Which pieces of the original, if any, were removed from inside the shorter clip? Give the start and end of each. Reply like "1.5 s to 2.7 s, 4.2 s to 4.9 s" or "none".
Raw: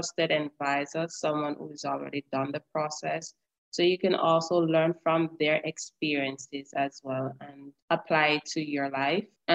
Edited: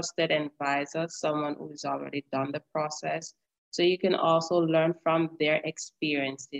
none